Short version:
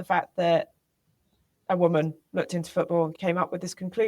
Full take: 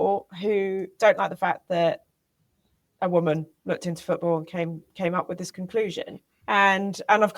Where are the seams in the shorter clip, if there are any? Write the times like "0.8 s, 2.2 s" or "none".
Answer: 3.1 s